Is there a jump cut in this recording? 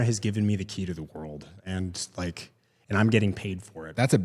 no; 0 cuts

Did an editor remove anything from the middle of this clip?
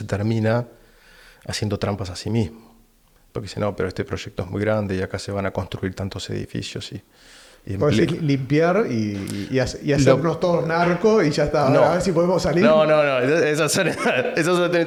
no; 0 cuts

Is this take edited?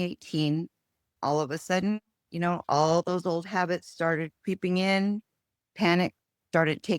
yes; 1 cut; at 1.2 s

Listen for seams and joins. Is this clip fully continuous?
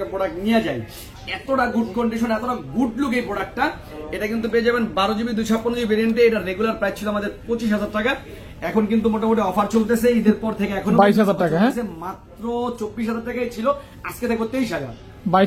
yes; 0 cuts

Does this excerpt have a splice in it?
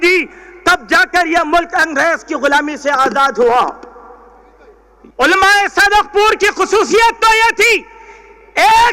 yes; 1 cut; at 5.1 s

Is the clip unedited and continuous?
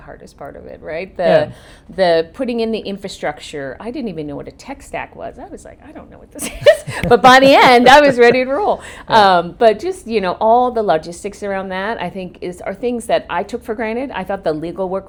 yes; 0 cuts

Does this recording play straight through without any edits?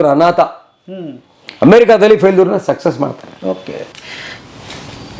yes; 0 cuts

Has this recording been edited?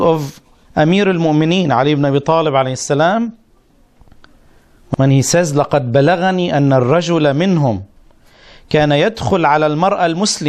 no; 0 cuts

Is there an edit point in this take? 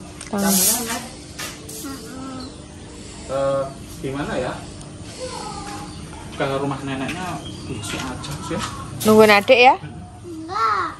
no; 0 cuts

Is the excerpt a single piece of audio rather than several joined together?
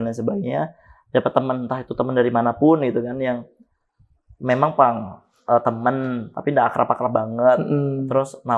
yes; 0 cuts

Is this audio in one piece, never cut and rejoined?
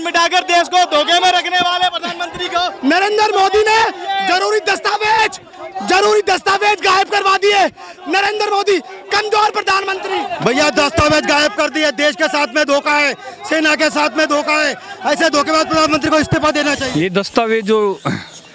no; 2 cuts; at 10.2 s, 16.8 s

